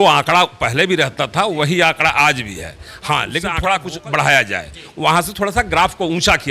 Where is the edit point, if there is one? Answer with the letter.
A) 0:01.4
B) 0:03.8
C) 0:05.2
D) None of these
B